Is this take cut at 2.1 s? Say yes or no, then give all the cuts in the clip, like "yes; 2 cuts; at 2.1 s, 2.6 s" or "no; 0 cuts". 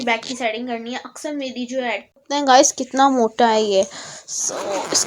yes; 1 cut; at 2.1 s